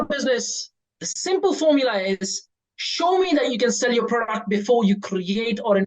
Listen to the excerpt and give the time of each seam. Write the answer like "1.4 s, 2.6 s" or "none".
none